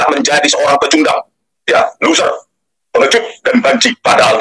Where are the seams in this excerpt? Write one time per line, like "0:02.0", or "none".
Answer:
none